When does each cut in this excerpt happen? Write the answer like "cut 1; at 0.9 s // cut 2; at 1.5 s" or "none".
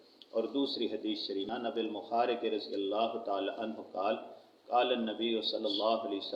cut 1; at 1.5 s